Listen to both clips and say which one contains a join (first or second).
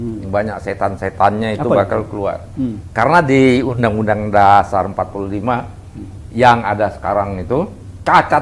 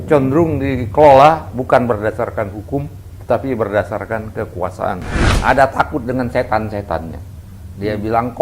second